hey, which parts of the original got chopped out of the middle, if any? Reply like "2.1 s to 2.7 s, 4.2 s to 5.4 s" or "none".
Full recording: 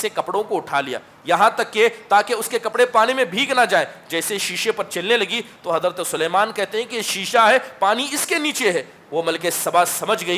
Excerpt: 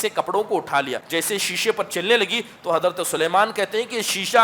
1.0 s to 4.0 s